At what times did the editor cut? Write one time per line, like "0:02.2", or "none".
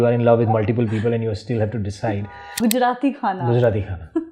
0:02.4